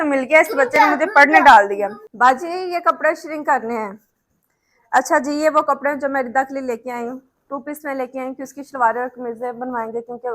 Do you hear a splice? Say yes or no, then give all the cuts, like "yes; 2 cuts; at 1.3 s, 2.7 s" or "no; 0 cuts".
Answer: yes; 1 cut; at 2.0 s